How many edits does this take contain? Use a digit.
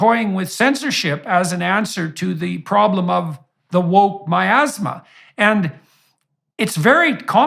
0